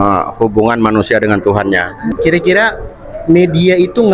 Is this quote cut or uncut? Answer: cut